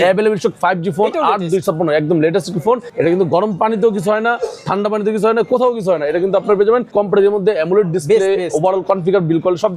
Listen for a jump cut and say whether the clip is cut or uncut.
cut